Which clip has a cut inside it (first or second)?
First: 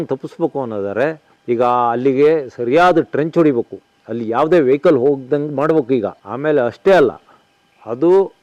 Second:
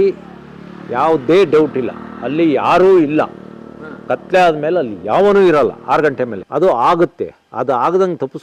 second